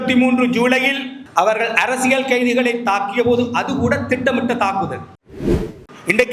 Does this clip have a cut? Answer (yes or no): yes